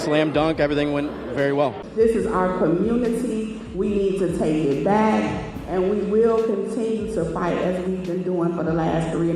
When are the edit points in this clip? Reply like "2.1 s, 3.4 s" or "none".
1.8 s